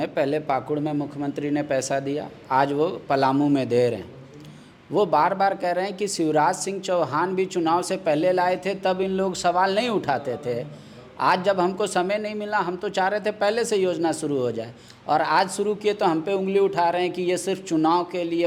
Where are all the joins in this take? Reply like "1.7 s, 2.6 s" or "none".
none